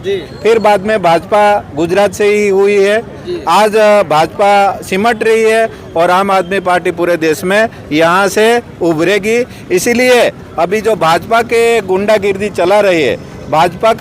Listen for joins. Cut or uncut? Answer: uncut